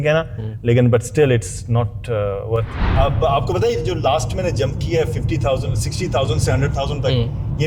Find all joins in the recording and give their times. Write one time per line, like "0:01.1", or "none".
0:02.8